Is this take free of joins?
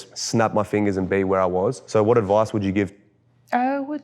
no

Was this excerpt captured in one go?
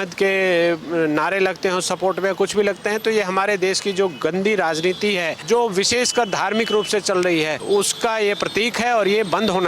no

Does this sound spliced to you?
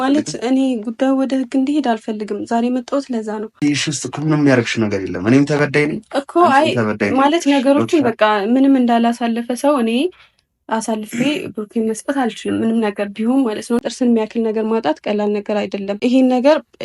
yes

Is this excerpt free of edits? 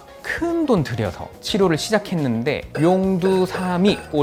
yes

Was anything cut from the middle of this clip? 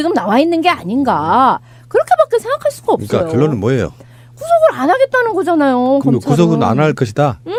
no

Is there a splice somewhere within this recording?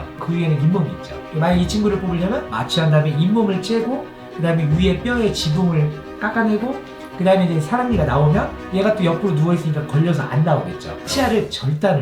yes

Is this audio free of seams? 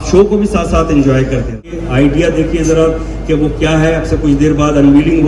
no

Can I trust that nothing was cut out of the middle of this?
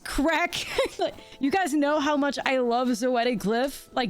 no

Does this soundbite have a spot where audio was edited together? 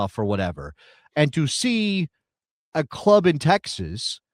no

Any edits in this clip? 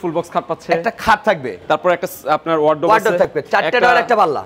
no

